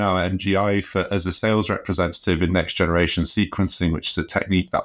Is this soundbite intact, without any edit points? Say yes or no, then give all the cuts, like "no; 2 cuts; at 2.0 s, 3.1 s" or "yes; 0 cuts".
yes; 0 cuts